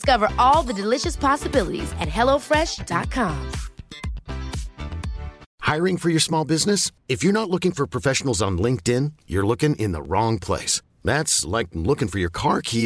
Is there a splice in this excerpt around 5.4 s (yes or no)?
yes